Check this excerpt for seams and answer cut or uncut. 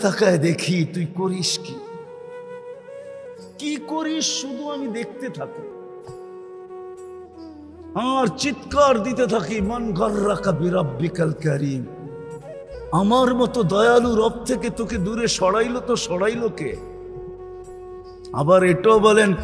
cut